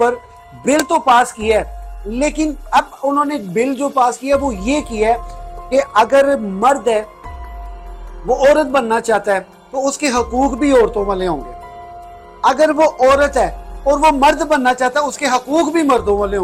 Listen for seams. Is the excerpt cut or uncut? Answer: uncut